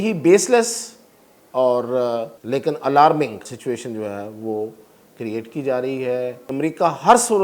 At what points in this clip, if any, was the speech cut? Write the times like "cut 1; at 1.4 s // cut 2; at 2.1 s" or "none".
cut 1; at 2.3 s // cut 2; at 3.5 s // cut 3; at 6.4 s